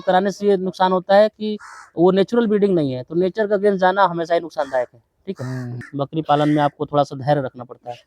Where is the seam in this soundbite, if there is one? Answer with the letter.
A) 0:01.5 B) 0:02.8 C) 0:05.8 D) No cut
C